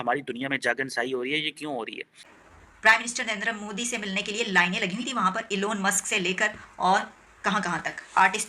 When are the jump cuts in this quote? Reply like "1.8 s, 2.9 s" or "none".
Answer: 2.2 s

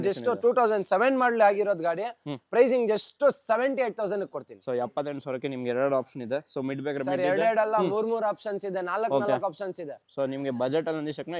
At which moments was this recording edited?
none

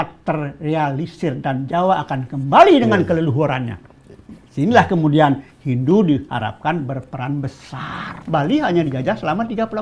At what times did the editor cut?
8.2 s

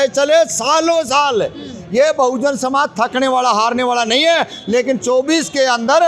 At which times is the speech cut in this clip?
none

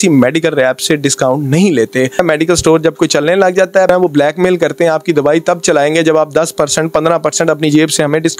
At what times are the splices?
2.2 s, 3.9 s

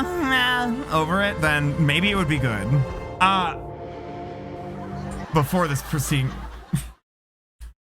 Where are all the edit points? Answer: 3.0 s

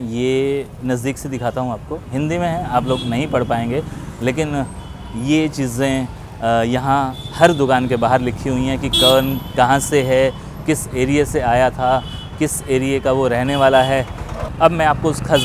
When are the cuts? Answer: 14.4 s

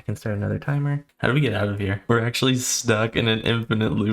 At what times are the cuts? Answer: 1.1 s, 2.0 s

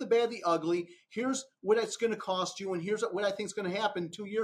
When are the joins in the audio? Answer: none

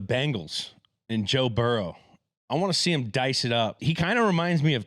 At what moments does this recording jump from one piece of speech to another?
3.8 s

